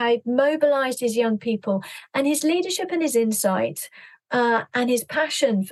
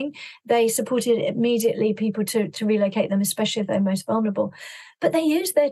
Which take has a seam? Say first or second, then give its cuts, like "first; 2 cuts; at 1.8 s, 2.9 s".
first; 1 cut; at 2.0 s